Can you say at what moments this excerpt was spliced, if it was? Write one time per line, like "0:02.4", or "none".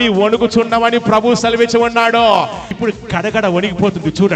0:02.6